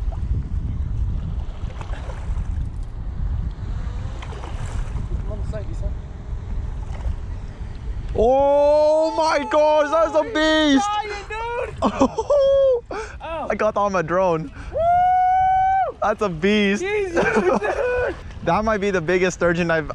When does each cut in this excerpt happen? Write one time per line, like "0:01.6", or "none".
0:18.2